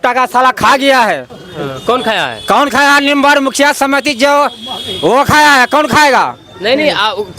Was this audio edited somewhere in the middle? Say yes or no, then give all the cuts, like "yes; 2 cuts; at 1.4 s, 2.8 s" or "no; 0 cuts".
no; 0 cuts